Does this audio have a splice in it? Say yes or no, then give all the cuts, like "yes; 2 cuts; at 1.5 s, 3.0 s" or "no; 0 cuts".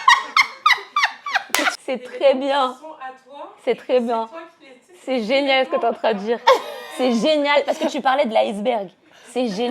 yes; 1 cut; at 1.7 s